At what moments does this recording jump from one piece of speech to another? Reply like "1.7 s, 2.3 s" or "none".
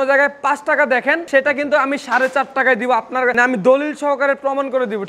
none

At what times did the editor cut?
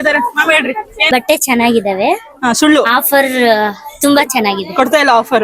0.9 s

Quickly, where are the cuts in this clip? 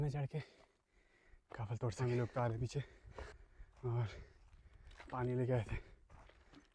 1.9 s

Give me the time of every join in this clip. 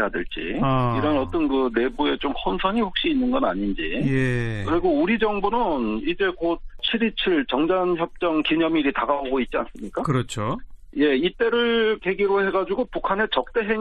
2.0 s

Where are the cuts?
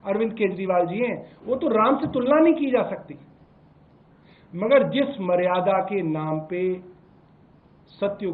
none

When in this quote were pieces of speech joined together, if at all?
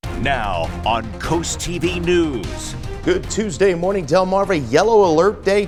none

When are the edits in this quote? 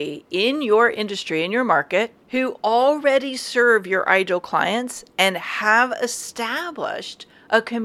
2.2 s

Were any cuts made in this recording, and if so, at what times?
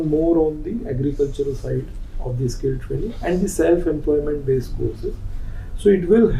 none

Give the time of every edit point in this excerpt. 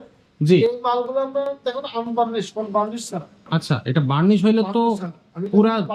none

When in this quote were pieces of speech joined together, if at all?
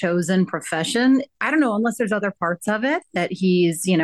1.3 s

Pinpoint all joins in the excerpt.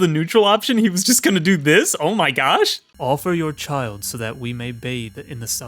2.8 s

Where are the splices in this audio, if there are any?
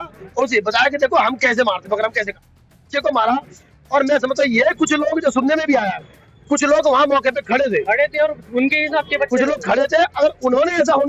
none

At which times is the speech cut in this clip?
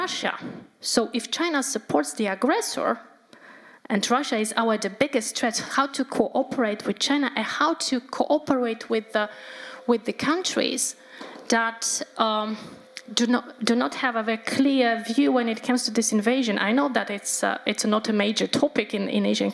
none

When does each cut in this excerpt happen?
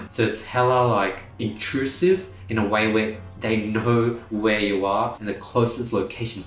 5.2 s

